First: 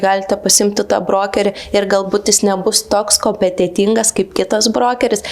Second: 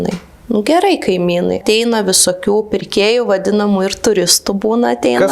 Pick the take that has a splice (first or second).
second